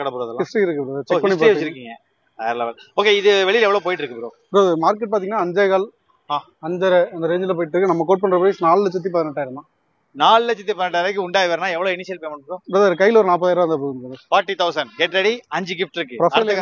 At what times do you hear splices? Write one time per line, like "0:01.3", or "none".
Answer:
none